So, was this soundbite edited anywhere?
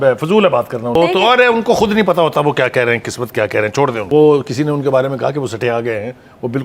yes; 2 cuts; at 1.0 s, 4.0 s

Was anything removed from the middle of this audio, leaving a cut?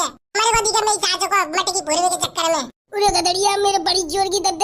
no; 0 cuts

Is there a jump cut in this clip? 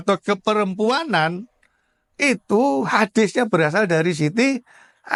no; 0 cuts

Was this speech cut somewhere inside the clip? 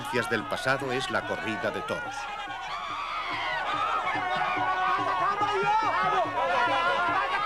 yes; 1 cut; at 6.3 s

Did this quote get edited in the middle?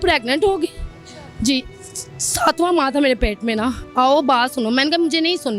yes; 1 cut; at 3.8 s

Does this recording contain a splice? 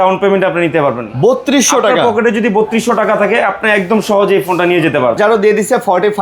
yes; 1 cut; at 5.2 s

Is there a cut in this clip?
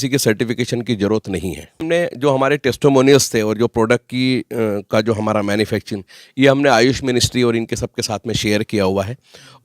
yes; 1 cut; at 1.7 s

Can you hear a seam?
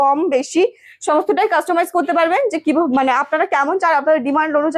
no; 0 cuts

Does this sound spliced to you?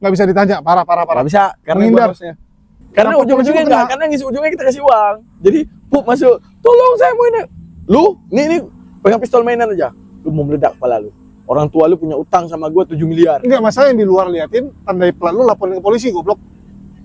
yes; 1 cut; at 2.7 s

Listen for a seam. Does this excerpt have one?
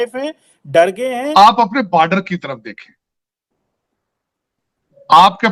yes; 1 cut; at 1.2 s

